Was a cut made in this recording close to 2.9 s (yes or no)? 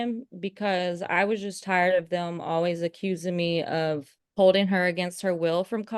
no